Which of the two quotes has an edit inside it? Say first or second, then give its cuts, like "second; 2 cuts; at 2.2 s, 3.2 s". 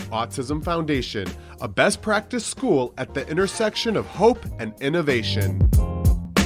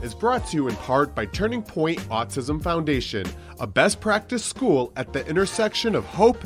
first; 1 cut; at 5.6 s